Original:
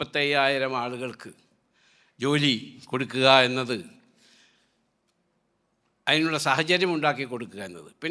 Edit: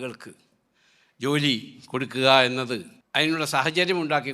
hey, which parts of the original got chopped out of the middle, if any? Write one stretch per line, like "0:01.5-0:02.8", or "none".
0:04.0-0:05.9

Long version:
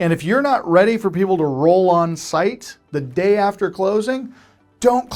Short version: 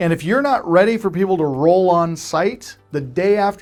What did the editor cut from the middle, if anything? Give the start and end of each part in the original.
none

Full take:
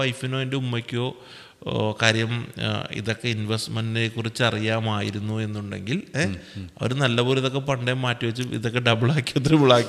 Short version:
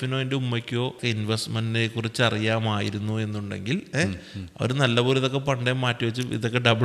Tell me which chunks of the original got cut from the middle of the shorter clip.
0:01.2-0:03.2

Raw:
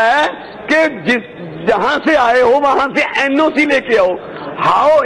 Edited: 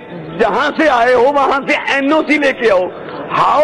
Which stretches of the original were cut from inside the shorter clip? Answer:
none

